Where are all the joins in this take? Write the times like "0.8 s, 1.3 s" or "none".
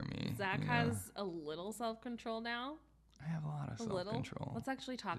none